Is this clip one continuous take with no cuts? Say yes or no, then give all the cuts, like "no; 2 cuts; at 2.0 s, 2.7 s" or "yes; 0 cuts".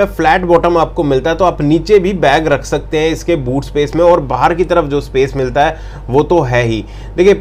yes; 0 cuts